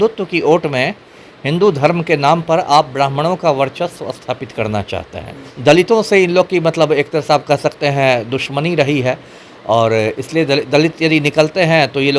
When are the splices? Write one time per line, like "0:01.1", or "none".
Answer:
0:05.4